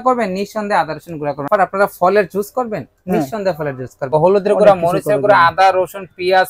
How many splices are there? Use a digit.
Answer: 2